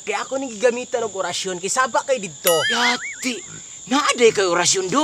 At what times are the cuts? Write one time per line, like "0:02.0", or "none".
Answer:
0:02.7

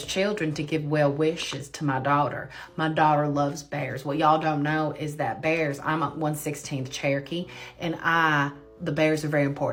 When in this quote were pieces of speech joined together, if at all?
none

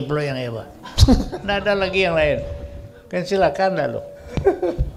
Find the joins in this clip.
none

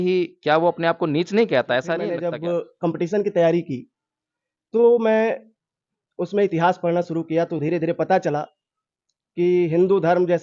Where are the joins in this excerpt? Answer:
0:02.1

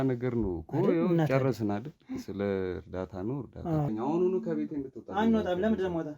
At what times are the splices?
0:03.9

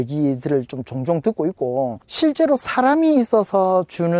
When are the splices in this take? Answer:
0:02.0

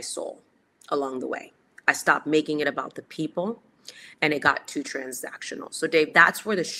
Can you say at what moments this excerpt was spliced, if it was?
none

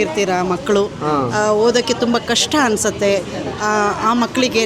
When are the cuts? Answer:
none

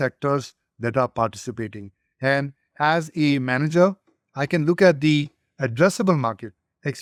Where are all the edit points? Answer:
none

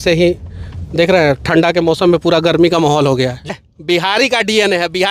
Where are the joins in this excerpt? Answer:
0:03.5

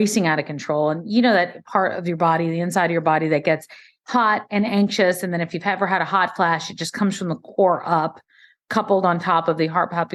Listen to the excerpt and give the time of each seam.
none

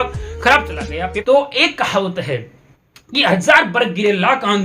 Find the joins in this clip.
0:01.2

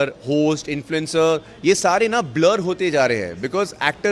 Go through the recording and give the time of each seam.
none

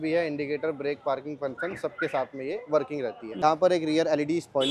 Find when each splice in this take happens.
0:03.4

